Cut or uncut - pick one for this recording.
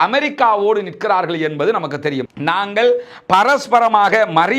cut